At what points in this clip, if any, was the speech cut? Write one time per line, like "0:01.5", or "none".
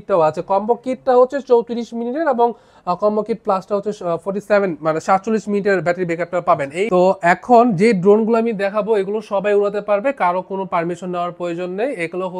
0:06.9
0:07.7

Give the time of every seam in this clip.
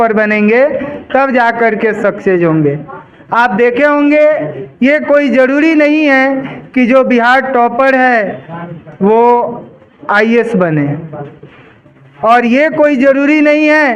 none

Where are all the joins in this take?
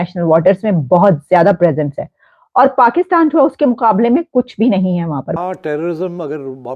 0:05.4

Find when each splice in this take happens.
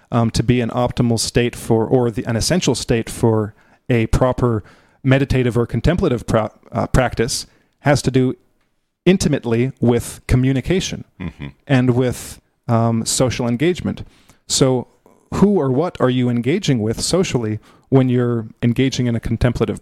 0:18.5

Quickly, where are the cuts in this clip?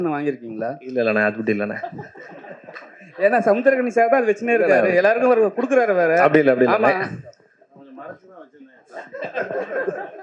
none

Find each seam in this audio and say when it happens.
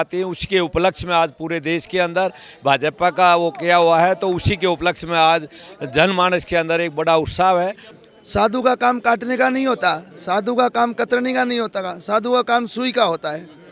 0:07.9

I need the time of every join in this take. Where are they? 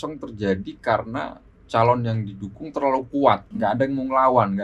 0:03.5

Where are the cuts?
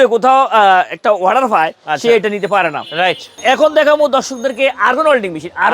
0:03.3

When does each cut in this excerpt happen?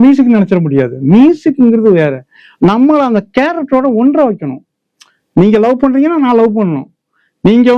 none

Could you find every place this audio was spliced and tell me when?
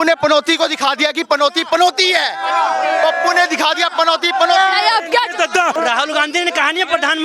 0:05.8

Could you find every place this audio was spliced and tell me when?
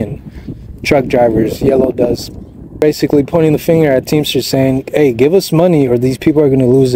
0:02.8

